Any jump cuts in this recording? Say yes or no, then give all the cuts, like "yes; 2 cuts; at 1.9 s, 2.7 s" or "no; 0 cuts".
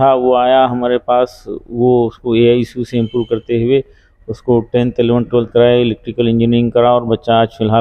no; 0 cuts